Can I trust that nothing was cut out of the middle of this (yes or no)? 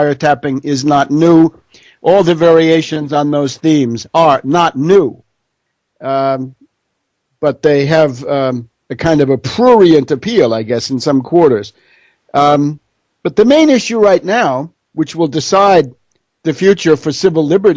yes